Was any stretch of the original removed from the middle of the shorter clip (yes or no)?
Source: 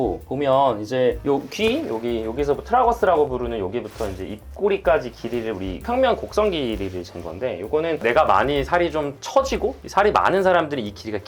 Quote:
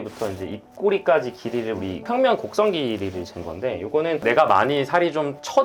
no